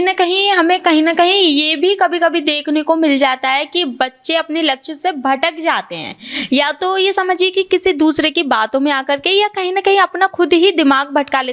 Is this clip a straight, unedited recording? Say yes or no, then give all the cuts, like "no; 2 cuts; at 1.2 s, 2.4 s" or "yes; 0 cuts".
yes; 0 cuts